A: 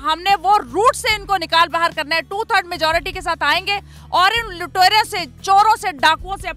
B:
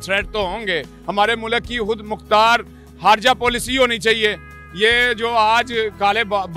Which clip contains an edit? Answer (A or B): B